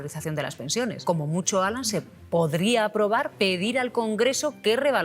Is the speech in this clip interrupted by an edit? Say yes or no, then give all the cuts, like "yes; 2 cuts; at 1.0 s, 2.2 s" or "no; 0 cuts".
yes; 2 cuts; at 1.0 s, 3.3 s